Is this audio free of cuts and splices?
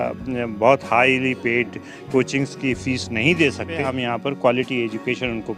no; 1 cut; at 3.9 s

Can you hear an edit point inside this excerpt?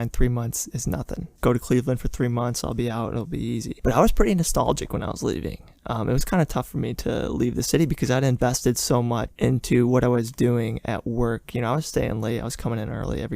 yes; 1 cut; at 1.3 s

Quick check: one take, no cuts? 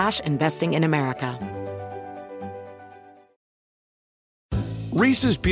no; 1 cut; at 1.3 s

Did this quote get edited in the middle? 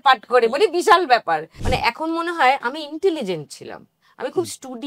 yes; 1 cut; at 1.5 s

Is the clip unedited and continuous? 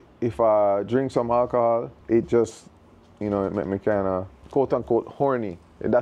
no; 2 cuts; at 2.0 s, 4.4 s

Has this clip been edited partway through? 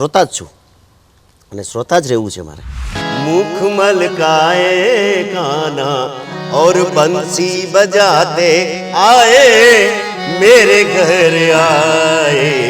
yes; 1 cut; at 3.0 s

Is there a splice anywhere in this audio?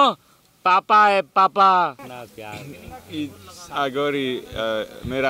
yes; 1 cut; at 2.0 s

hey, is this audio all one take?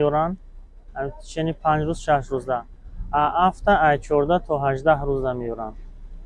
yes; 0 cuts

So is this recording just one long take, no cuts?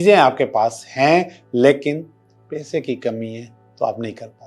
yes; 0 cuts

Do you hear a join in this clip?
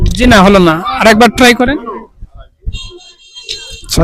no; 0 cuts

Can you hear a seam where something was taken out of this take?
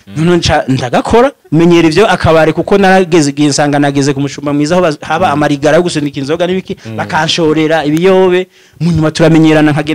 yes; 1 cut; at 1.4 s

